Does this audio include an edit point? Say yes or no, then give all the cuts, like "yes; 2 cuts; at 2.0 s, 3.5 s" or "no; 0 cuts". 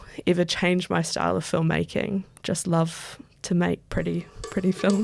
no; 0 cuts